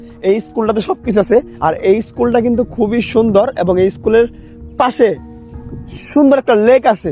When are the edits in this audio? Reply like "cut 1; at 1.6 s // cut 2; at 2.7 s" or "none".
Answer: none